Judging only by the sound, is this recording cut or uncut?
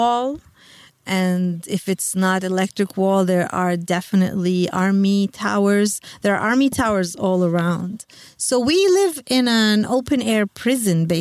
cut